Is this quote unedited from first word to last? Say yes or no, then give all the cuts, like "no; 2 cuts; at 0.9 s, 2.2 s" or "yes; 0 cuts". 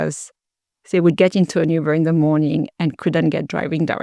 yes; 0 cuts